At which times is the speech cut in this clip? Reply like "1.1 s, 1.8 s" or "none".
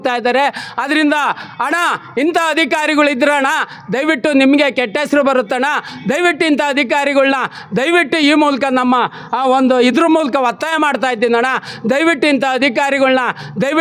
none